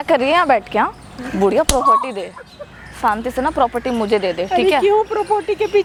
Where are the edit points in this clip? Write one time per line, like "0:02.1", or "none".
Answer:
none